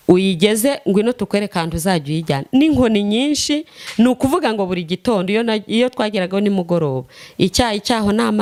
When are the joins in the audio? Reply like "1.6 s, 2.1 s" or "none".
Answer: none